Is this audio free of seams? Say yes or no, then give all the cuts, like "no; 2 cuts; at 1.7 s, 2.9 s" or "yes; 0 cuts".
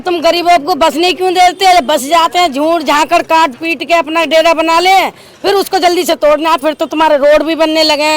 yes; 0 cuts